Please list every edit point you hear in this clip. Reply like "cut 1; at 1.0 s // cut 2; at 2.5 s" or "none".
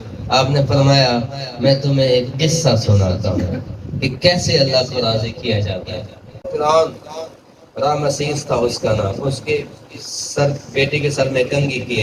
cut 1; at 6.4 s